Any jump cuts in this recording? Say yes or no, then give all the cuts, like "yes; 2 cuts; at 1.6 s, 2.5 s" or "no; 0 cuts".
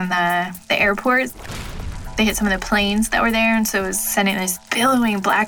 no; 0 cuts